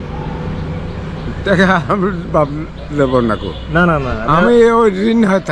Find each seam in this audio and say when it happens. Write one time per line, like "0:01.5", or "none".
none